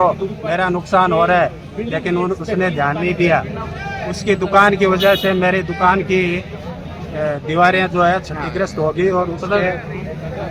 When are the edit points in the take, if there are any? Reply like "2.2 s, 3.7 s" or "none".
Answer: none